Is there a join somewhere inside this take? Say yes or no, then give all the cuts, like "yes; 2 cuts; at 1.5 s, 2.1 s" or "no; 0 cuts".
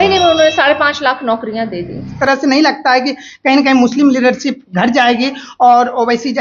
yes; 1 cut; at 2.1 s